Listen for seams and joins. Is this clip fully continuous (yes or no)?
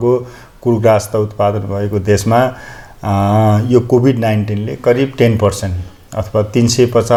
yes